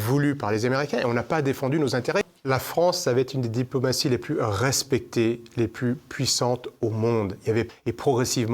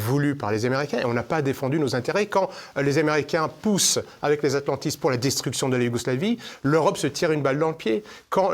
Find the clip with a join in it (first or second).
first